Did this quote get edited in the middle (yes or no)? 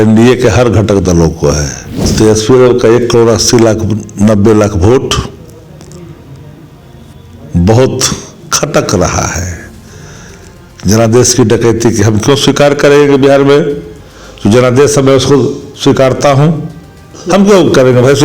yes